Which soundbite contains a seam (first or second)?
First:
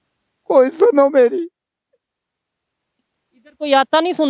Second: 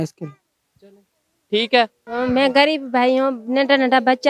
second